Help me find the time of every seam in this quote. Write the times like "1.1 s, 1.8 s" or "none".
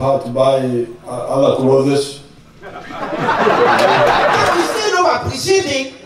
1.0 s, 4.5 s